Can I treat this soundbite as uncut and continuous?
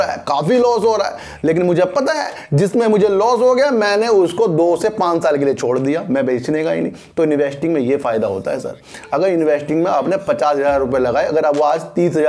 yes; 0 cuts

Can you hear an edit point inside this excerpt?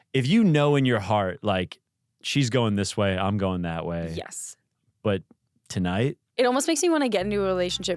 yes; 1 cut; at 6.4 s

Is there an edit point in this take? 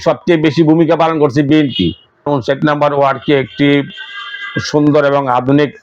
yes; 1 cut; at 2.3 s

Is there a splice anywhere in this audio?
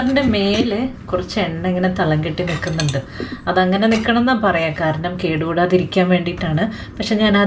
no; 0 cuts

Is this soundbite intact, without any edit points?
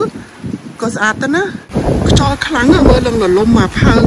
no; 1 cut; at 1.7 s

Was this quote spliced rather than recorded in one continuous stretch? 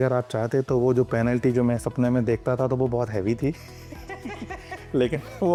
no; 0 cuts

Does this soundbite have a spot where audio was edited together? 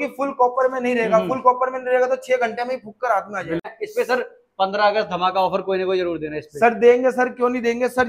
yes; 1 cut; at 3.7 s

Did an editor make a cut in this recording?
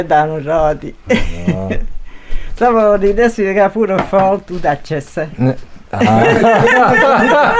no; 0 cuts

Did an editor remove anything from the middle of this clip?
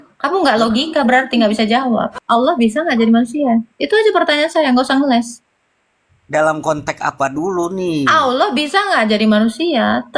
yes; 1 cut; at 2.2 s

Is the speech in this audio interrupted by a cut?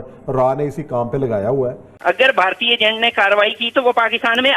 yes; 1 cut; at 1.9 s

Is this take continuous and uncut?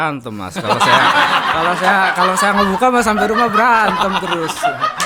yes; 0 cuts

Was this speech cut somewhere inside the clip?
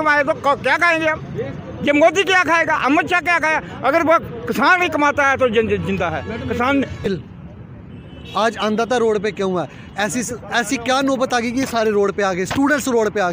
yes; 1 cut; at 7.1 s

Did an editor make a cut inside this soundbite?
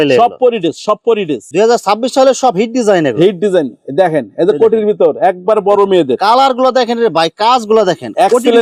no; 0 cuts

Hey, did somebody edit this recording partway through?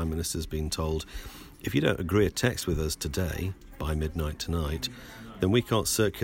no; 0 cuts

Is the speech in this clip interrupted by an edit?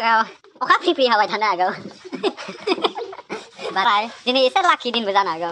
yes; 1 cut; at 3.9 s

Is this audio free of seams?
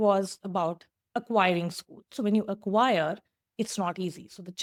yes; 0 cuts

